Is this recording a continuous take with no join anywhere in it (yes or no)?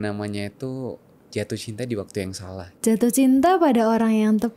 no